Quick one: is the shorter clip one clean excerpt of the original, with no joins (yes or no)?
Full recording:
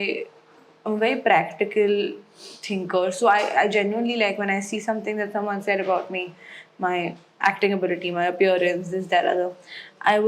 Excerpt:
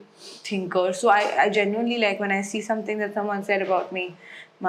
yes